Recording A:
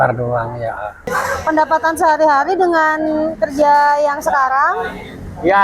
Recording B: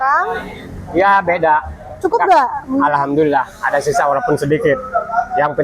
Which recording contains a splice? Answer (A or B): A